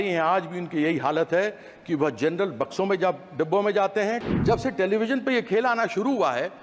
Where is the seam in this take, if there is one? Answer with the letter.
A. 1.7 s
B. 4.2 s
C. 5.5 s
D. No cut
B